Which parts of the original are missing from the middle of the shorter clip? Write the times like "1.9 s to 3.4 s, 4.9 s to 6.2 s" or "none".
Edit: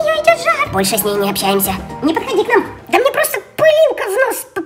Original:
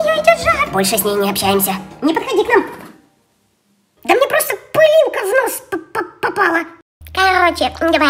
2.8 s to 3.9 s